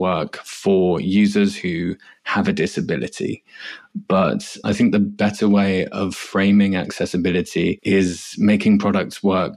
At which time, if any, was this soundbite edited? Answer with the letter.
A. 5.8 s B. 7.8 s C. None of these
B